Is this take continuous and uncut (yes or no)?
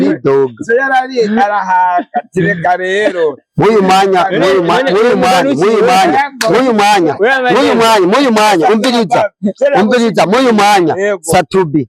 yes